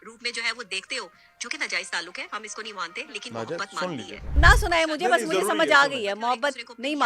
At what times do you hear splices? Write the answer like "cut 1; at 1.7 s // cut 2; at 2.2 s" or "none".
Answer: cut 1; at 4.4 s